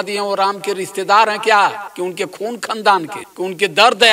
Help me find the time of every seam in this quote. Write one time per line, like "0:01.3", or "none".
0:01.9
0:03.2